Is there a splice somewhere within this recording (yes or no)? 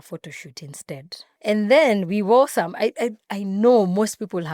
no